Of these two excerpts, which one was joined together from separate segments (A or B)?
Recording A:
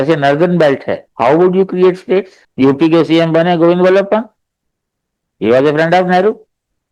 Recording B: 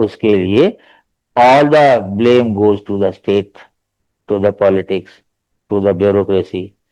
A